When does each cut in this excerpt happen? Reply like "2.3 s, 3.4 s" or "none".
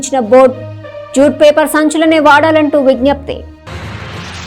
none